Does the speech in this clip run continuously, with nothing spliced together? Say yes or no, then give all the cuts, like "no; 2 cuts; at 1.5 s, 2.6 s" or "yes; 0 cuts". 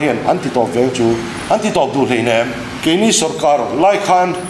no; 2 cuts; at 1.3 s, 2.6 s